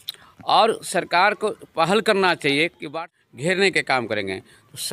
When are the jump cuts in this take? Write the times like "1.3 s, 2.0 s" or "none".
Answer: 2.9 s